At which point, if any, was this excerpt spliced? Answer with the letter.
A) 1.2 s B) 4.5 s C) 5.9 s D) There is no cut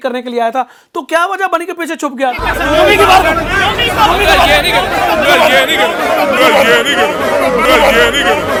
D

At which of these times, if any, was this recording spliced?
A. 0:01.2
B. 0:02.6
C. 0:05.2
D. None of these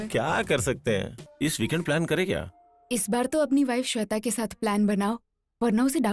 A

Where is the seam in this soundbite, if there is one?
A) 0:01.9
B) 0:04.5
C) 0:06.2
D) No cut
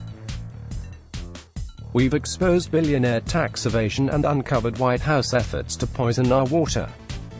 A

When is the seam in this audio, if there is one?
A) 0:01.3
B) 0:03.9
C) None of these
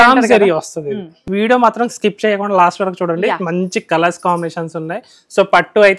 A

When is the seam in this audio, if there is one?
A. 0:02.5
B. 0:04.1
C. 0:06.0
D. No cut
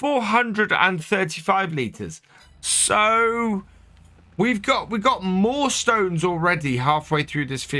D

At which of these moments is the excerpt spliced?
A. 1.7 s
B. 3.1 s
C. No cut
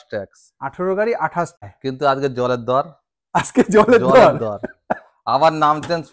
A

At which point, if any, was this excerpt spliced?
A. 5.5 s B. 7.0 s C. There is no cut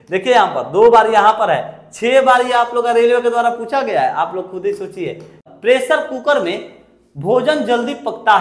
A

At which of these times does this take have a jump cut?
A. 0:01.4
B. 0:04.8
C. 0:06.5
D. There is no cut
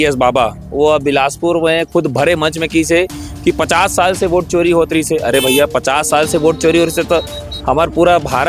D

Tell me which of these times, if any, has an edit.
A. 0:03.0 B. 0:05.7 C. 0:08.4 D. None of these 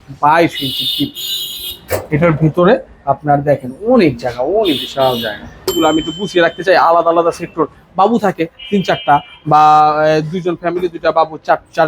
B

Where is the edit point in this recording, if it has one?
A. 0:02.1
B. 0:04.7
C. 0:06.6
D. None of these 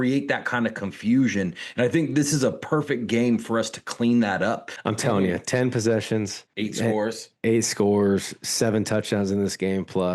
B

